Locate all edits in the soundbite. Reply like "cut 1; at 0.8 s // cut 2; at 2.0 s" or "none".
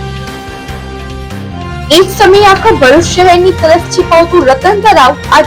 cut 1; at 1.5 s

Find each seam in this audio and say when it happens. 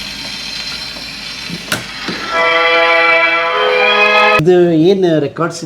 cut 1; at 4.4 s

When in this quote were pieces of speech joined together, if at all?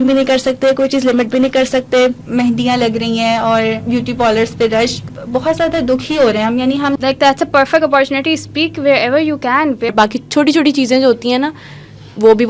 cut 1; at 2.2 s // cut 2; at 5.1 s // cut 3; at 7.0 s // cut 4; at 9.9 s

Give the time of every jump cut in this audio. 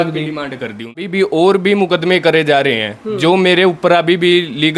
cut 1; at 1.0 s

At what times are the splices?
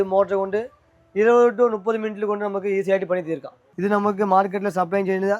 cut 1; at 3.6 s

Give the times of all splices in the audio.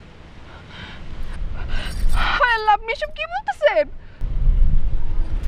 cut 1; at 4.2 s

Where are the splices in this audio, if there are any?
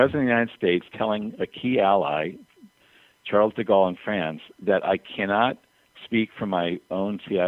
none

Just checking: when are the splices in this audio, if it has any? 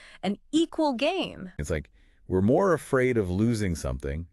cut 1; at 1.5 s

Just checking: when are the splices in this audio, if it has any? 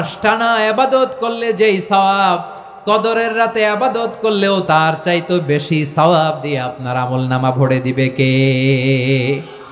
cut 1; at 4.6 s

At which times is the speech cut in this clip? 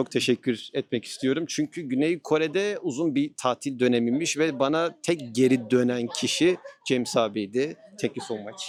none

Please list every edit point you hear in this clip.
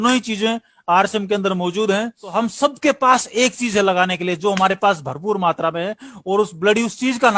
cut 1; at 2.3 s

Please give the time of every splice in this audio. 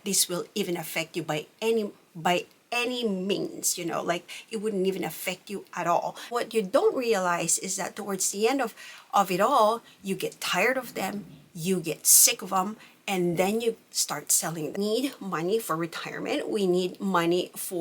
cut 1; at 6.3 s // cut 2; at 14.8 s

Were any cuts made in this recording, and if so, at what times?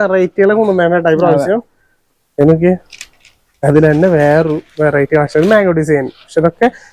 none

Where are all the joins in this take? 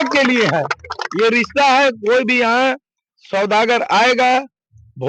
none

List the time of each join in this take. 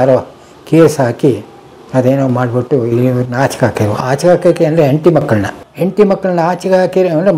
none

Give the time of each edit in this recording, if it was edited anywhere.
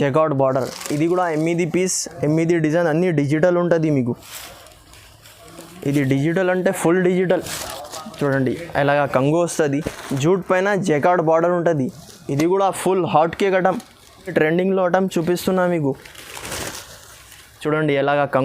cut 1; at 9.9 s // cut 2; at 14.3 s

